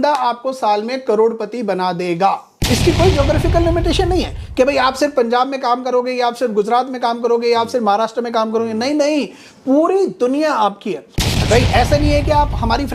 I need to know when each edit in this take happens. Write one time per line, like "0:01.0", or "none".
0:02.5
0:11.1